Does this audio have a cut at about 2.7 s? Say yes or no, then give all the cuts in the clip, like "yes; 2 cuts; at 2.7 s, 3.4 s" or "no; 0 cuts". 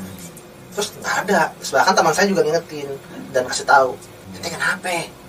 no; 1 cut; at 4.2 s